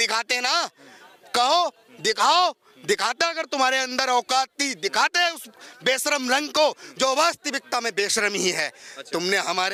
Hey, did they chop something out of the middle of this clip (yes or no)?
no